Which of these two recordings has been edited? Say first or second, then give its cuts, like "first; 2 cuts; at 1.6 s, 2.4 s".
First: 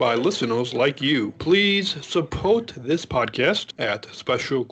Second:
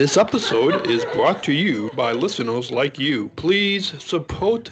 first; 1 cut; at 3.8 s